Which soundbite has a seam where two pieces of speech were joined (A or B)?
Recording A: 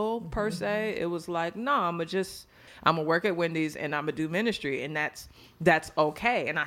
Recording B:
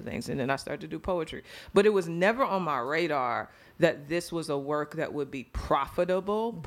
A